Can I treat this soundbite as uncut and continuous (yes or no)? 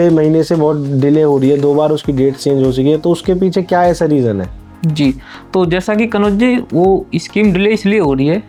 yes